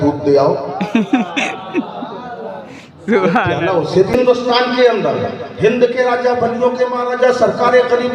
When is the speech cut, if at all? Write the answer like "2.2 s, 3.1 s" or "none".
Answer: 4.1 s